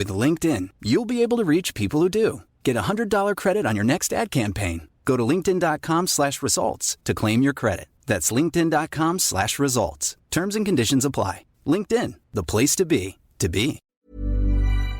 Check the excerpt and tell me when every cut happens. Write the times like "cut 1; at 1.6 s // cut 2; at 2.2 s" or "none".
cut 1; at 13.9 s

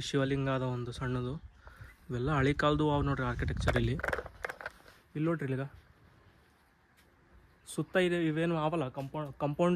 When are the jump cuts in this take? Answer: none

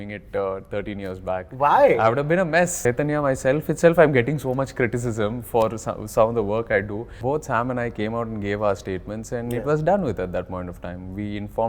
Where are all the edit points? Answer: cut 1; at 2.8 s // cut 2; at 7.1 s

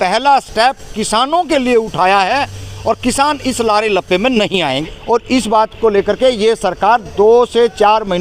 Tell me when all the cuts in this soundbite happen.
cut 1; at 4.8 s

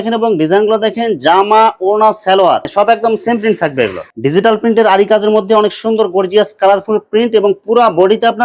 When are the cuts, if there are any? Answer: cut 1; at 4.0 s

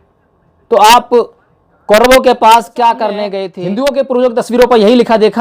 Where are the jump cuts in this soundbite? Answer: cut 1; at 3.4 s

